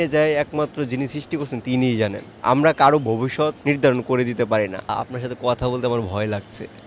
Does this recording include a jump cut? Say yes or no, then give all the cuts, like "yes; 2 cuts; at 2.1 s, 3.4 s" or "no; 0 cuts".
yes; 3 cuts; at 2.3 s, 3.6 s, 4.9 s